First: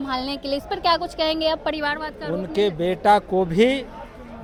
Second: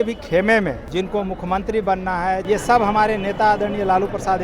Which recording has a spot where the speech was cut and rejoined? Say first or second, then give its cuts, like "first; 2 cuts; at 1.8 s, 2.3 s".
second; 2 cuts; at 0.8 s, 2.4 s